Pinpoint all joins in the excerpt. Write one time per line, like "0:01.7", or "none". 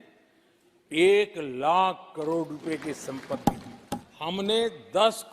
0:03.7